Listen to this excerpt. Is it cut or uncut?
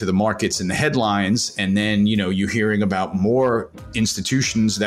uncut